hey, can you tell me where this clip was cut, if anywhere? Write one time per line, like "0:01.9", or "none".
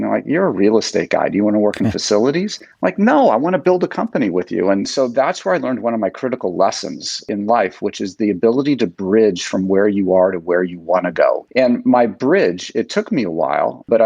0:04.9
0:11.5

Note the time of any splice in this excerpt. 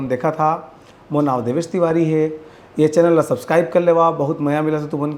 none

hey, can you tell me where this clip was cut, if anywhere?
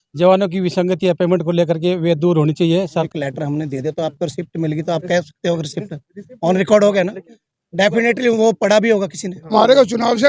0:03.1
0:09.5

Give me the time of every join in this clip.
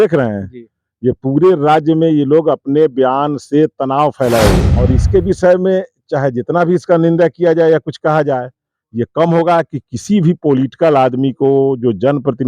0:04.7

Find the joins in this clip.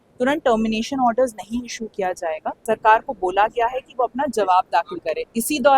0:02.6

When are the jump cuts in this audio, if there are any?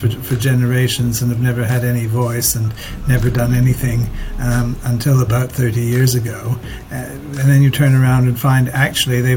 0:06.8

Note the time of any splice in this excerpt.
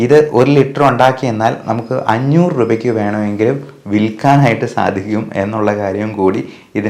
none

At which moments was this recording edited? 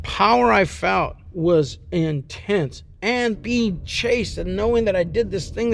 0:01.2
0:03.3

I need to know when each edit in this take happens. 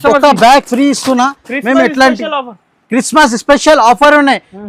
none

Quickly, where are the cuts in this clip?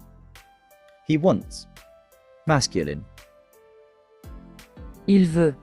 0:01.1

